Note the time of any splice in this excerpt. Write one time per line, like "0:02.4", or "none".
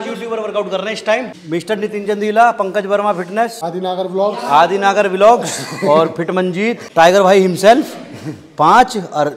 0:01.4
0:03.6
0:06.8

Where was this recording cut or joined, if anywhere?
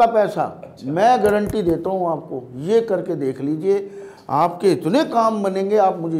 none

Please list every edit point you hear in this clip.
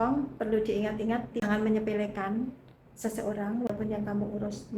0:01.5
0:03.7

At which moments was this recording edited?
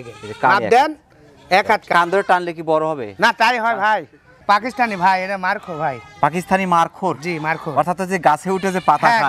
0:01.9
0:04.4

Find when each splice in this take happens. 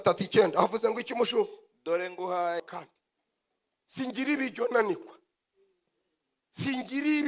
0:02.6

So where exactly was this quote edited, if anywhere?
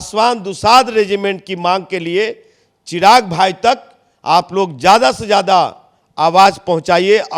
none

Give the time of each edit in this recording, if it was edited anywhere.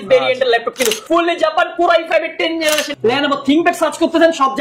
0:01.0
0:02.9

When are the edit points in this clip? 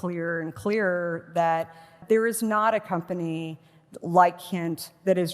0:01.9

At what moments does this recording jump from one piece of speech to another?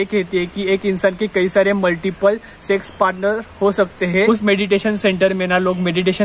0:04.2

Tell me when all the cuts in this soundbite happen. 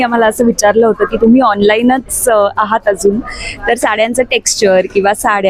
none

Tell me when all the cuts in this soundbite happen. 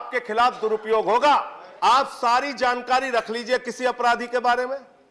0:01.6

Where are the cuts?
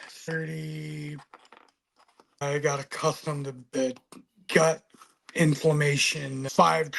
0:02.4
0:03.6

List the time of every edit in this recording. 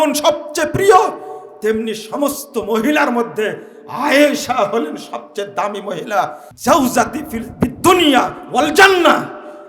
0:06.5

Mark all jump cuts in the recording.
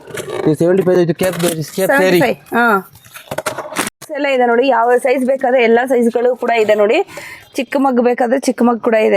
0:04.0

